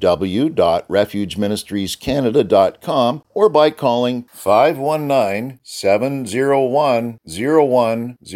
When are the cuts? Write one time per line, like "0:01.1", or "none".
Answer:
0:03.2